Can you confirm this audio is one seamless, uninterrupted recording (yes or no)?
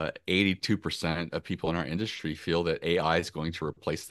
yes